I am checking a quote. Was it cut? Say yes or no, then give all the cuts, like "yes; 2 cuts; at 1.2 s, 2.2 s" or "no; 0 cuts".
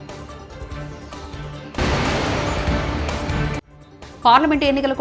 yes; 2 cuts; at 1.5 s, 3.7 s